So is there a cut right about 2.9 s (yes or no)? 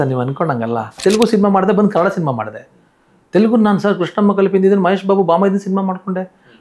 no